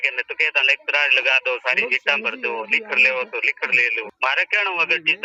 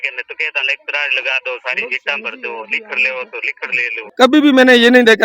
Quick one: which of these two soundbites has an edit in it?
second; 1 cut; at 4.1 s

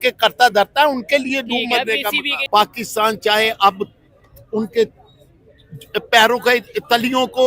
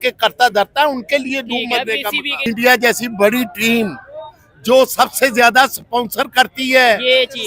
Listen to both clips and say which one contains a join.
second; 1 cut; at 2.4 s

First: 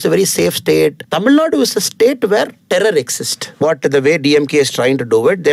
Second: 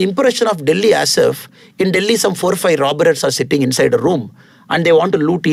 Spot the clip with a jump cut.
first; 3 cuts; at 1.0 s, 2.6 s, 3.6 s

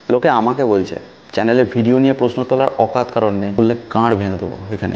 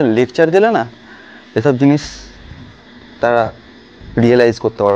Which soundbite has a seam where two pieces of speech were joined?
first; 1 cut; at 3.6 s

